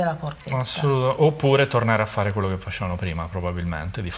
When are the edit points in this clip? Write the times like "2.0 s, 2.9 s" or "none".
none